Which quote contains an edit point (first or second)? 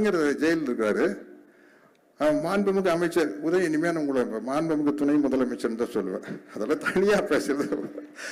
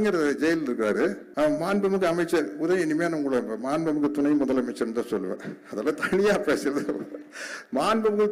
second